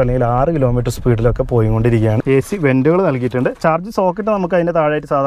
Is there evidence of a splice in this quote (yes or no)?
yes